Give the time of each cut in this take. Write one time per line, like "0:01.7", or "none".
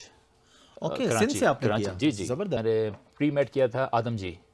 0:02.6

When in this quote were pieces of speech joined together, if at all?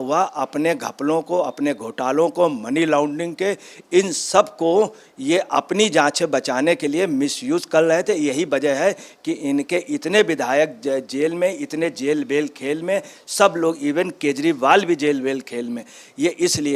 none

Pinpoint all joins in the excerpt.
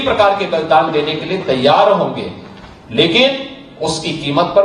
none

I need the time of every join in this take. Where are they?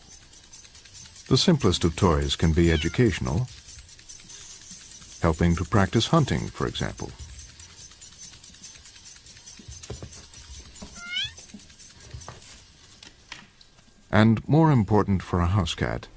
none

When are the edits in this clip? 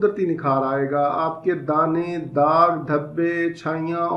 none

